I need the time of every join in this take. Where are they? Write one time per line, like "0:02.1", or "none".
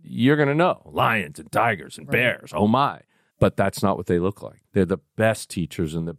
0:04.5